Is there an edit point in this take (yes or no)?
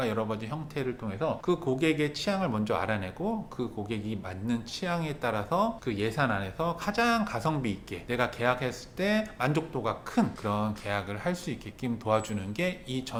no